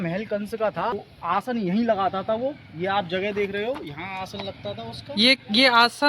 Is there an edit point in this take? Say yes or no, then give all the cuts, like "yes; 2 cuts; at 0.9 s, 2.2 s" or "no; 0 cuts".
yes; 1 cut; at 0.9 s